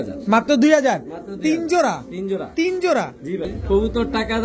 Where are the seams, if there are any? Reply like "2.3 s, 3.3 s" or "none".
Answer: 3.5 s